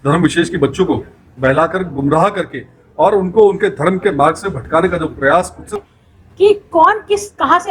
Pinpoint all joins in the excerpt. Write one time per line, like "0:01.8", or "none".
0:05.8